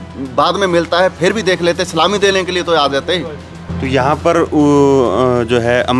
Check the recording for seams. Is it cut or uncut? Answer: cut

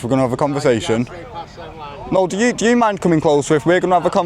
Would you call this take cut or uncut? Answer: uncut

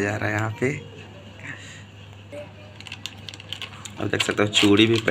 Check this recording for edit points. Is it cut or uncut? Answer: cut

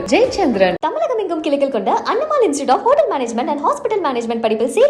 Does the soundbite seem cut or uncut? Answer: uncut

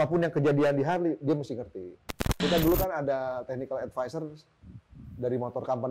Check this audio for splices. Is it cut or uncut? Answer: cut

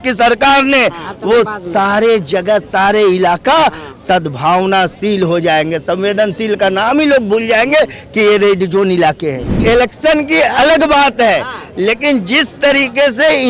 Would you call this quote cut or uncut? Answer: cut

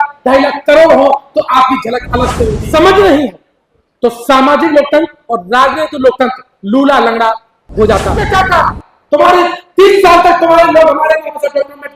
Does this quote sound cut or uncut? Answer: cut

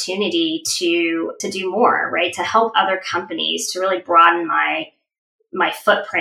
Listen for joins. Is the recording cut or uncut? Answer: cut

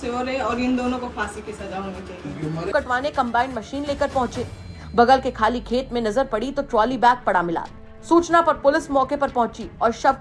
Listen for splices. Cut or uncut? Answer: cut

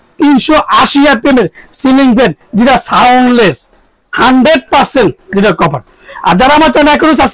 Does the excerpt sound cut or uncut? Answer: uncut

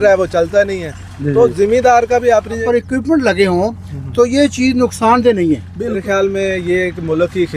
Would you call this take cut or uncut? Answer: cut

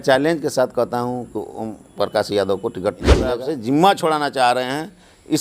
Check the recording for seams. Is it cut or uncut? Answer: cut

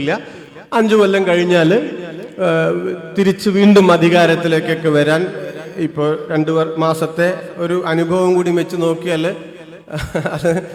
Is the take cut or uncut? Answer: uncut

